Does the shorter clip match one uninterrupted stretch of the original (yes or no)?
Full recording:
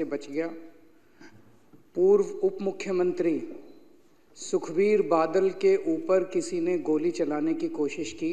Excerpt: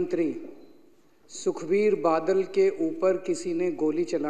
yes